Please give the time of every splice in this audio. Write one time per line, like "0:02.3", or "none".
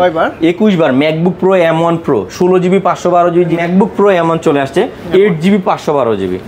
0:03.6